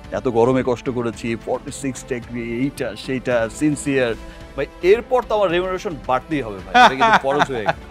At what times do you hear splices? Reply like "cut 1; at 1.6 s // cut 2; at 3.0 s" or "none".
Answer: none